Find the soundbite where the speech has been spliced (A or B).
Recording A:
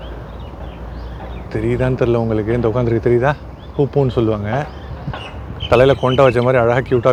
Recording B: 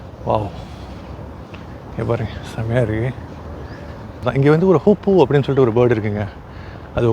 B